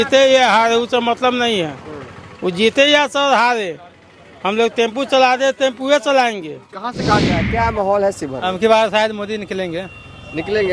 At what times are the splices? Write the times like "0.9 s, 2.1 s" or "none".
7.4 s